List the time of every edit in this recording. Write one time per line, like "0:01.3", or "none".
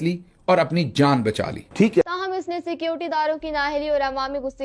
0:02.0

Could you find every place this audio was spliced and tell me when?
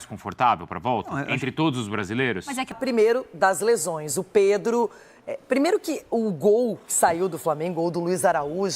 0:02.7

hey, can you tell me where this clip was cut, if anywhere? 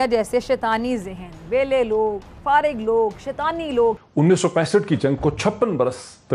0:04.0

